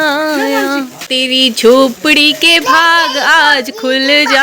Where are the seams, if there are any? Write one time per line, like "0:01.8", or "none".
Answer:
0:01.0